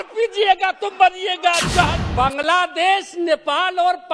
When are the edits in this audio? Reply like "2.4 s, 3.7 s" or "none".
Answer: 2.1 s